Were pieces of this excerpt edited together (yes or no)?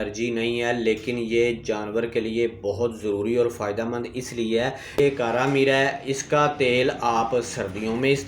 yes